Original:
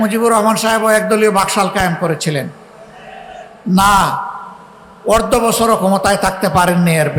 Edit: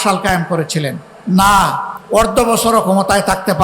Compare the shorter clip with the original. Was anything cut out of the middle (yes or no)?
yes